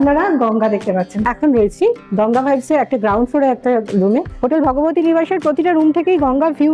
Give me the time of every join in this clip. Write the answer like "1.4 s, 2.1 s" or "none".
1.1 s, 4.3 s